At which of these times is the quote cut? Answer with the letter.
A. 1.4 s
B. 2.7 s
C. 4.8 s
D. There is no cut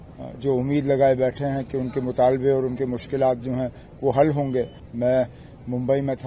C